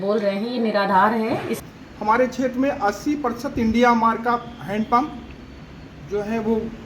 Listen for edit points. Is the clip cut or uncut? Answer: cut